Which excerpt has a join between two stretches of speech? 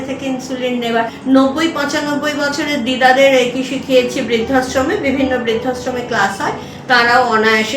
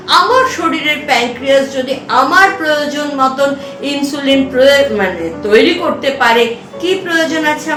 first; 1 cut; at 1.2 s

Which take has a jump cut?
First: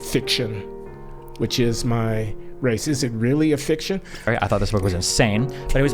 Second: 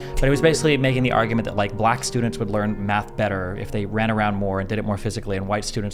first; 1 cut; at 4.3 s

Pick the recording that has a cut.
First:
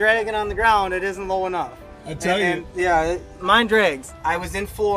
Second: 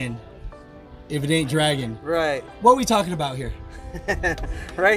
first; 1 cut; at 4.1 s

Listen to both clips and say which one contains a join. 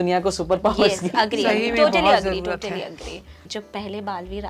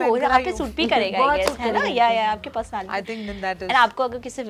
first; 1 cut; at 3.5 s

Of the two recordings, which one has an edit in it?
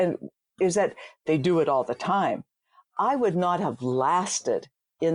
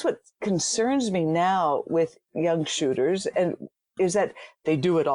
second; 1 cut; at 2.3 s

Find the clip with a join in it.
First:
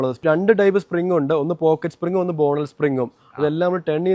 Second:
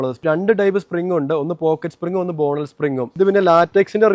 second; 1 cut; at 3.1 s

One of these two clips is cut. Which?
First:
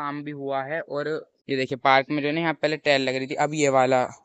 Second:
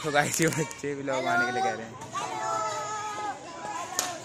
first; 1 cut; at 1.3 s

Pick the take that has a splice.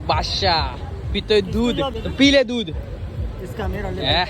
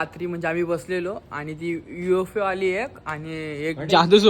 first; 1 cut; at 2.0 s

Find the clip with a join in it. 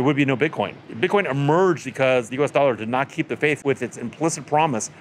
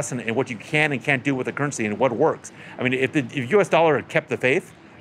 first; 3 cuts; at 0.9 s, 2.0 s, 3.6 s

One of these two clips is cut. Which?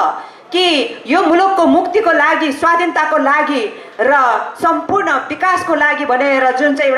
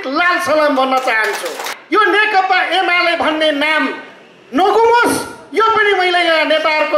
second; 1 cut; at 1.7 s

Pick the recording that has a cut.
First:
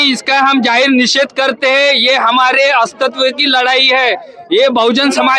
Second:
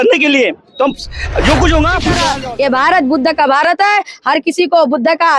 second; 1 cut; at 2.2 s

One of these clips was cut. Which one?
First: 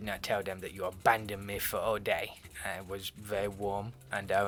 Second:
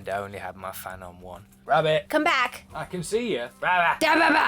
second; 1 cut; at 1.6 s

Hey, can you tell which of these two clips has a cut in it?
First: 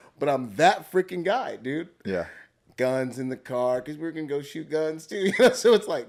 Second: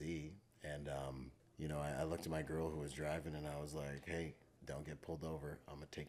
second; 2 cuts; at 1.4 s, 4.5 s

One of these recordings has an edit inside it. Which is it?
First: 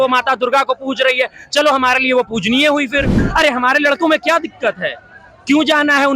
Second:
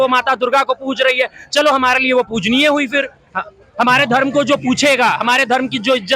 first; 1 cut; at 3.2 s

